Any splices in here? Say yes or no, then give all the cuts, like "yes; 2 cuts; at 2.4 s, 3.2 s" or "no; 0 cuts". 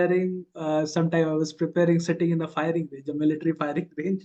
no; 0 cuts